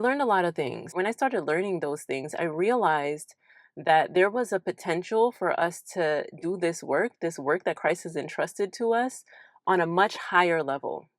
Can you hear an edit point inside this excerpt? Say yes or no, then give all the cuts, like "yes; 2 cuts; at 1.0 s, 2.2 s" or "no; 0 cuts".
yes; 1 cut; at 0.9 s